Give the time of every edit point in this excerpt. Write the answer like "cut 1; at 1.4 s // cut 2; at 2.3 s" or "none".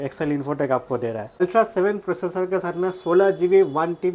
cut 1; at 1.4 s